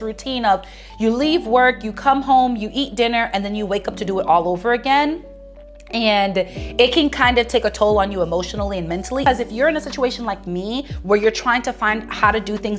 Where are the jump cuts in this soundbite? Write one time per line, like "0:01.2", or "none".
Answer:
0:09.2